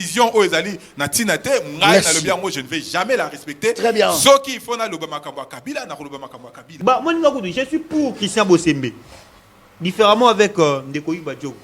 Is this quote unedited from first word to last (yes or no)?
no